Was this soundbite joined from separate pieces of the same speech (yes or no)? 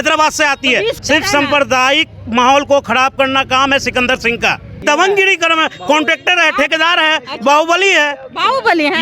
yes